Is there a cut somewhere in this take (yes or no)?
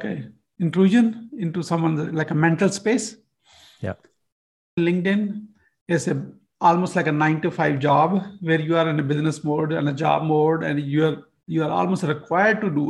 yes